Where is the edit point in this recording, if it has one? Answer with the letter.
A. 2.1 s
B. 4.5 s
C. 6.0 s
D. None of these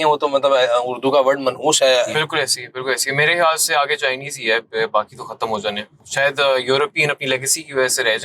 A